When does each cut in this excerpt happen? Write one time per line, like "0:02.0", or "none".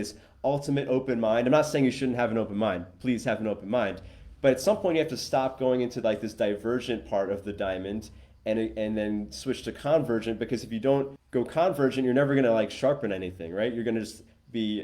0:11.2